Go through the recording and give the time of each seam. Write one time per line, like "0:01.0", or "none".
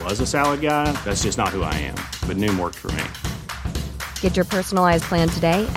none